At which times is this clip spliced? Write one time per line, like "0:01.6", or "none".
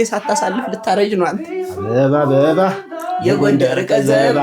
none